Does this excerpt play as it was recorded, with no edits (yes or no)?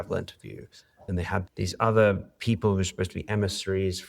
yes